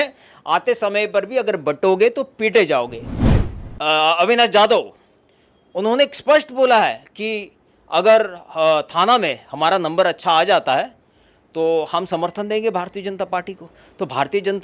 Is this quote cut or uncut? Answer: cut